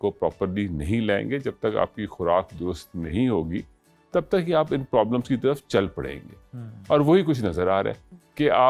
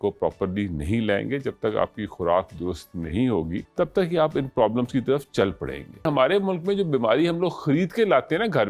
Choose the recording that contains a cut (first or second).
second